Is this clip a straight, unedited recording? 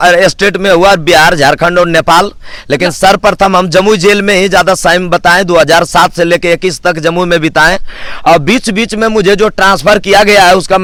yes; 0 cuts

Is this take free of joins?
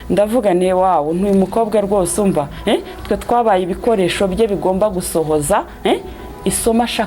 yes; 0 cuts

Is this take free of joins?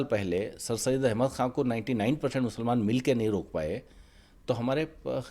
yes; 0 cuts

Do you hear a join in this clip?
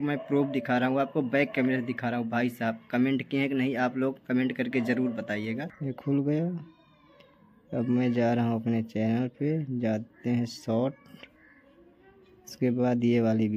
yes; 1 cut; at 5.7 s

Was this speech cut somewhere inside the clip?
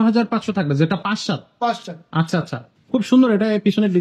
yes; 1 cut; at 2.6 s

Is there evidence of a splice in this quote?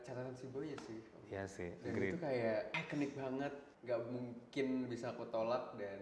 yes; 2 cuts; at 2.8 s, 3.7 s

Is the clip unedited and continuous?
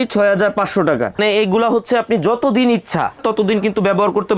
no; 1 cut; at 1.2 s

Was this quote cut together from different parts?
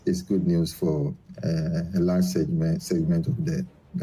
no; 0 cuts

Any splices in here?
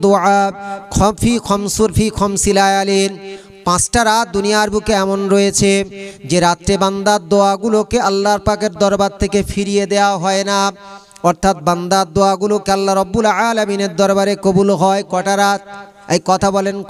no; 0 cuts

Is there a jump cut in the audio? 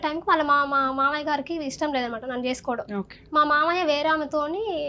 no; 0 cuts

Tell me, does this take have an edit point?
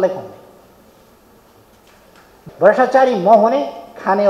yes; 1 cut; at 2.4 s

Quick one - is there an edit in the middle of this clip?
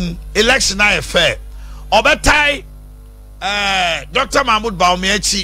no; 0 cuts

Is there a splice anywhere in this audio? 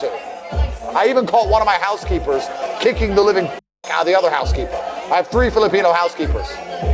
no; 0 cuts

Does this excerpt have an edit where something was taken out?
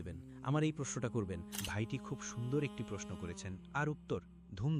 yes; 1 cut; at 1.5 s

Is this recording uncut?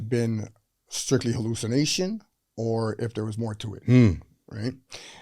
yes; 0 cuts

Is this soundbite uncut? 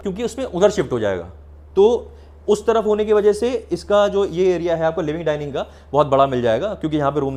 yes; 0 cuts

